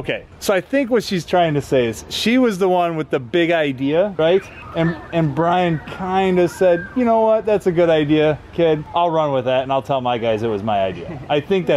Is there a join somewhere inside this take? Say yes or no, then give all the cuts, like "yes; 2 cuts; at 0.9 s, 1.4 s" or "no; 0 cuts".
no; 0 cuts